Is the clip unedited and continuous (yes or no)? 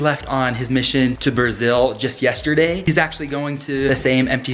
yes